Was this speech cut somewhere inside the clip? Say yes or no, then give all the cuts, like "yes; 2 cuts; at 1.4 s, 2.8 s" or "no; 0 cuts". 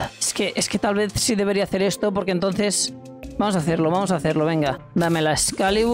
yes; 1 cut; at 4.8 s